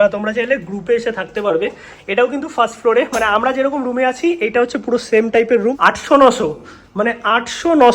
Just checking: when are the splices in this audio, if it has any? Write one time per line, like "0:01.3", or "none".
0:05.8